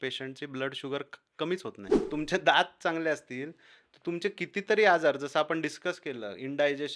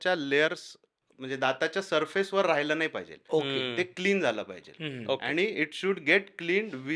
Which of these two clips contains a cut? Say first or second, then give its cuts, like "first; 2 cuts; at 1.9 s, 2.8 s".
first; 1 cut; at 2.1 s